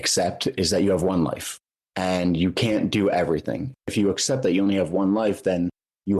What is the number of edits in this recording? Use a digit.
1